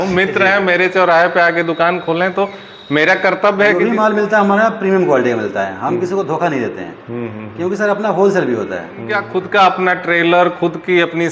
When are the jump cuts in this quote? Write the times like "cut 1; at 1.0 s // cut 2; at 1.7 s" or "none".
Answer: cut 1; at 3.7 s // cut 2; at 9.2 s